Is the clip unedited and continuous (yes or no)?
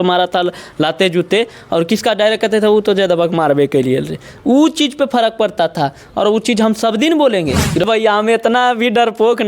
no